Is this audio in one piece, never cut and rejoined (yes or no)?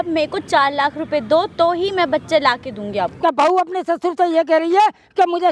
no